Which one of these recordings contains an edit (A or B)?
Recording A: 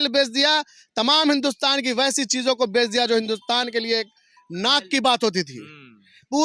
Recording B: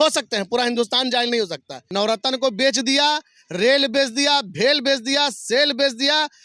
B